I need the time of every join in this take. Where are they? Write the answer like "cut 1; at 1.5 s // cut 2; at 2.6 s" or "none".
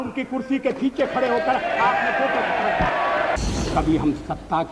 cut 1; at 3.4 s